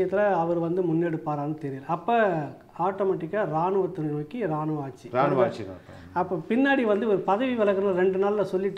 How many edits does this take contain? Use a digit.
0